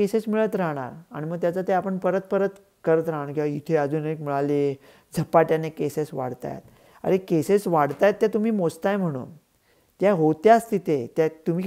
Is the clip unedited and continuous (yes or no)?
yes